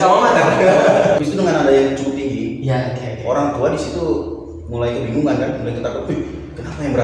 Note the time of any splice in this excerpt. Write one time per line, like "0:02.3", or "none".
0:01.2